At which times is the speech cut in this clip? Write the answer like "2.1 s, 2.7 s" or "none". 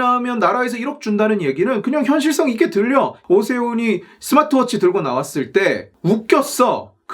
3.2 s